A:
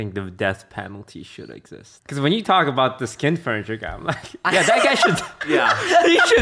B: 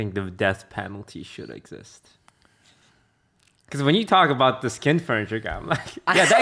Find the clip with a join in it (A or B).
A